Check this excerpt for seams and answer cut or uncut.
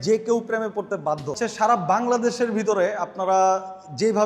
cut